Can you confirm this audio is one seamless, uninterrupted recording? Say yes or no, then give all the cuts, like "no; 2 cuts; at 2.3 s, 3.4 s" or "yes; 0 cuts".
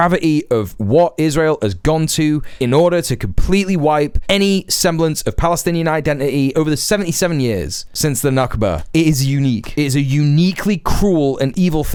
yes; 0 cuts